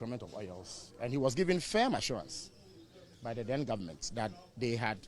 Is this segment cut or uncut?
uncut